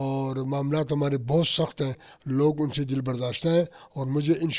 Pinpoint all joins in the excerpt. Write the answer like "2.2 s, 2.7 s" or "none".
2.1 s